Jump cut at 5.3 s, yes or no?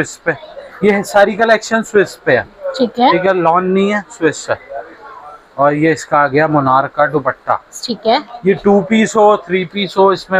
no